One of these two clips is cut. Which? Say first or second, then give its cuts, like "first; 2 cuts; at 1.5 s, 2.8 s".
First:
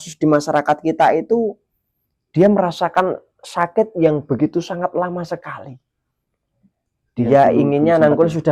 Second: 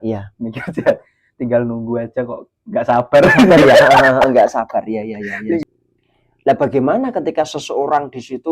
second; 1 cut; at 5.6 s